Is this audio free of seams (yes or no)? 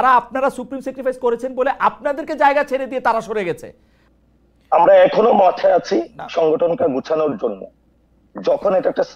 no